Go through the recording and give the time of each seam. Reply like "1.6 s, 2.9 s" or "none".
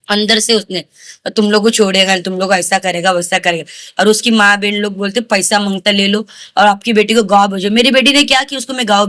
none